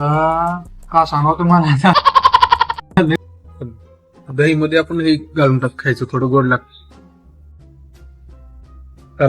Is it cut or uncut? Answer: cut